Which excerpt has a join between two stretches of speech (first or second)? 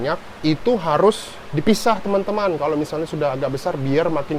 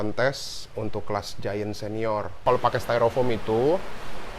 second